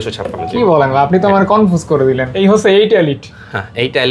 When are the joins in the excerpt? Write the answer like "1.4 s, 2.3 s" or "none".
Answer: 2.3 s